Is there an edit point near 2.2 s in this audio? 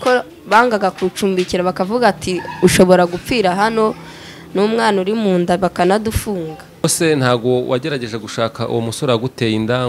no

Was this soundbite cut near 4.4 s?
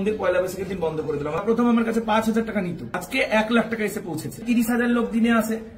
yes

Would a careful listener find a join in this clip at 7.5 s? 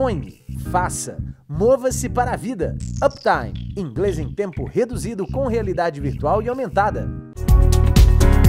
yes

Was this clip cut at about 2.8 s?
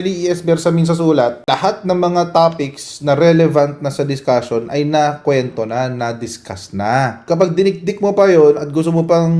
no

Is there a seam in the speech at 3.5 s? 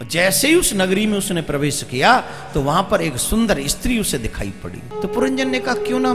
no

